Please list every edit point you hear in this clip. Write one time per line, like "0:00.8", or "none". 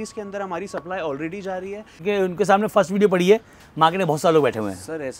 0:02.0

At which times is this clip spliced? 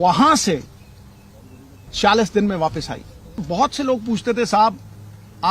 0:03.4

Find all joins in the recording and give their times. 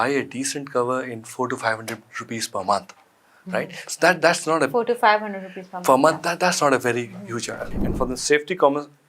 0:07.7

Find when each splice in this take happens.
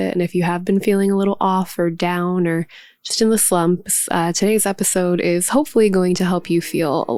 none

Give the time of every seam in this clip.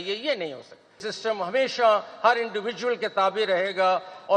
0:01.0

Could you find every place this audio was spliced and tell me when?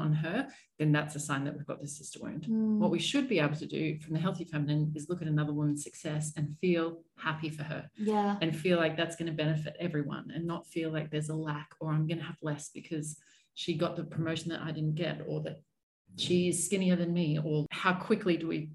0:17.7

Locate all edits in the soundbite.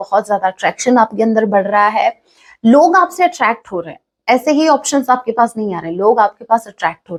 none

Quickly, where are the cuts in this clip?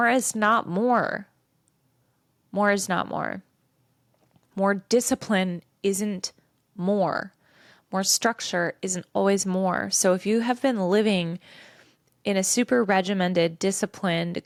none

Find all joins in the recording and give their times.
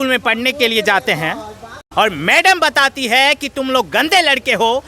0:01.8

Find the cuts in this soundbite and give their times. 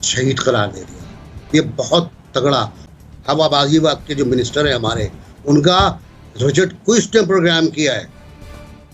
0:02.8

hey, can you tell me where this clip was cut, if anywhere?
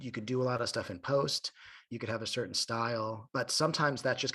0:03.2

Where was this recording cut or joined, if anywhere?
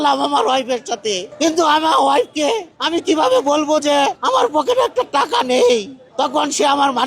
0:01.3
0:02.7
0:04.2
0:06.0

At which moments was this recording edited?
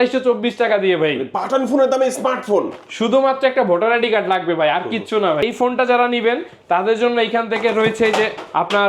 0:05.4

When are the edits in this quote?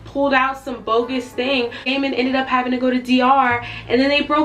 0:01.8

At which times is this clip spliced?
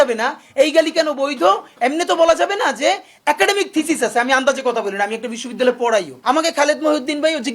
0:06.1

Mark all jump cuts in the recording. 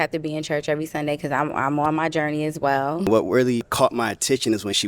0:03.1
0:03.7

